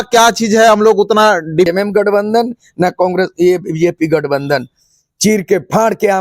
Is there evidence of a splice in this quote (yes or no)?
yes